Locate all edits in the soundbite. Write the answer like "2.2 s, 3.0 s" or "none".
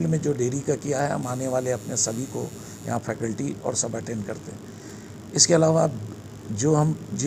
none